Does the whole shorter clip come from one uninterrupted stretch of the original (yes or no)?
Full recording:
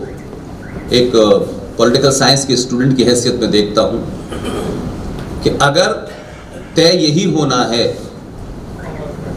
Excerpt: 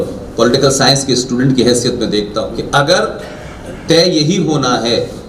no